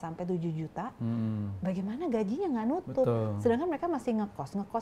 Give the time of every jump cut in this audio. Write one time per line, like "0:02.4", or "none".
none